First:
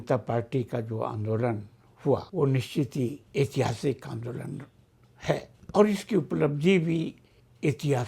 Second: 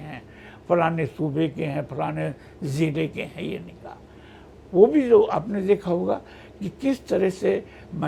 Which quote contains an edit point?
first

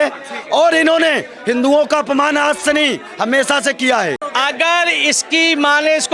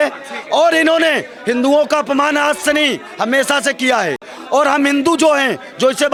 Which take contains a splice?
first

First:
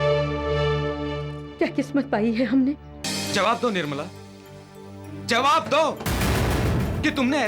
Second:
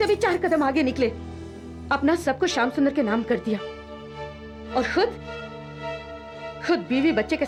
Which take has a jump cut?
first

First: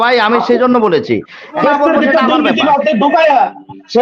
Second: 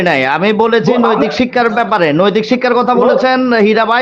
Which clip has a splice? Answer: first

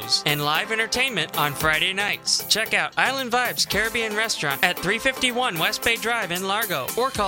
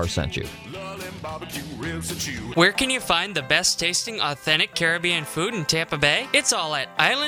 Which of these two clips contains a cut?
second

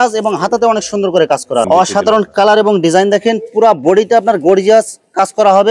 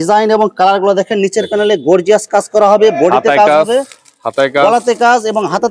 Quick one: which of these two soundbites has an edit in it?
first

